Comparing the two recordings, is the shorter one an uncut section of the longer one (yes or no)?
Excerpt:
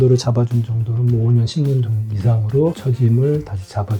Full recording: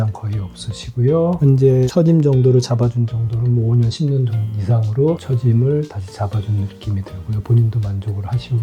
yes